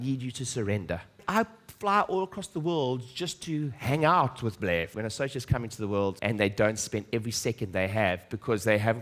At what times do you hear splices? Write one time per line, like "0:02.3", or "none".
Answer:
0:01.2
0:04.9
0:06.2